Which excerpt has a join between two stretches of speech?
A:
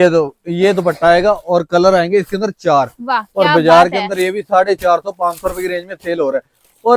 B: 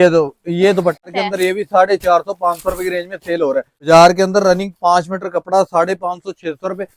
B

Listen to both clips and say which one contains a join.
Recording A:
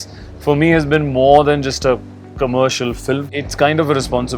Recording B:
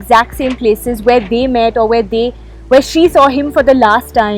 A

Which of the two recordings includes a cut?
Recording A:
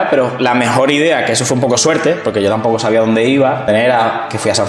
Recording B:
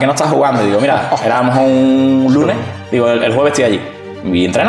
A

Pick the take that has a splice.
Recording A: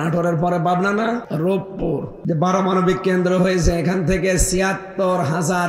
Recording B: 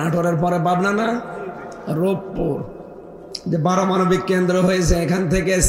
A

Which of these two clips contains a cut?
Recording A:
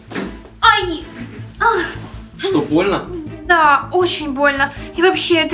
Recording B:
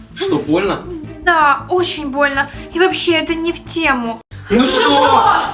B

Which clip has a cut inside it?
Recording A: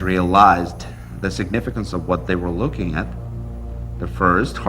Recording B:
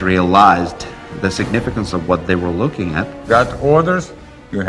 B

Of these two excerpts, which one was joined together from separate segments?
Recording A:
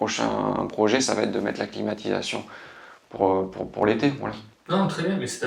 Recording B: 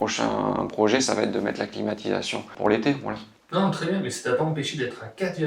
B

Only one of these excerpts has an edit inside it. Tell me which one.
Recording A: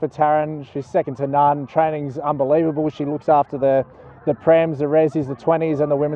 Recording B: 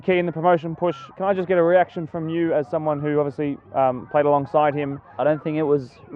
B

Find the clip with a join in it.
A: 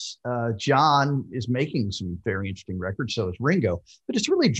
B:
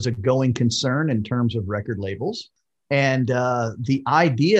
B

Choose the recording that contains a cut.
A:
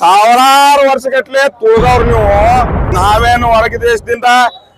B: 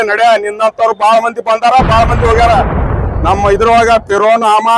A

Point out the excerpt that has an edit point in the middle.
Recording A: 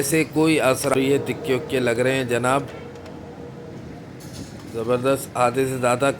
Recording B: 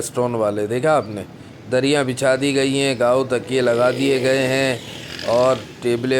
A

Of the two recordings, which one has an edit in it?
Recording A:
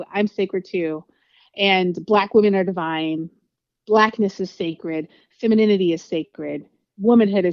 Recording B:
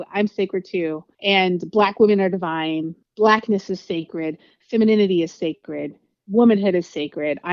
B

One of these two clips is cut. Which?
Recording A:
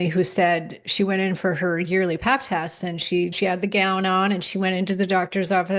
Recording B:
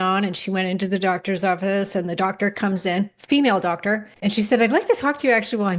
B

